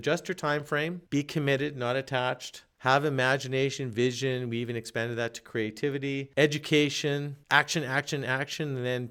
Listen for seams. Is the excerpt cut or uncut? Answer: uncut